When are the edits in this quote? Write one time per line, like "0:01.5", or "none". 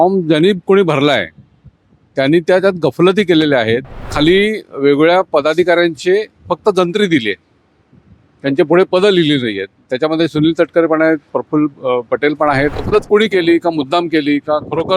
0:04.1
0:12.8